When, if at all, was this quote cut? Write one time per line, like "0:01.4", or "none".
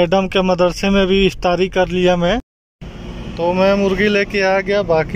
0:02.5